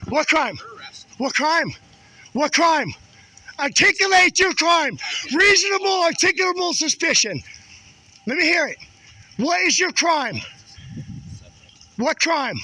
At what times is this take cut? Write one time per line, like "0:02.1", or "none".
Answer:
none

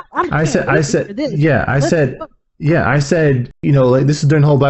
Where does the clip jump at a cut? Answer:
0:03.6

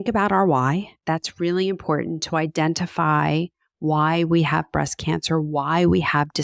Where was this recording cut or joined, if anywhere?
0:01.0

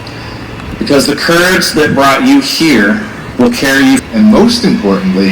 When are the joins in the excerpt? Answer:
0:04.0

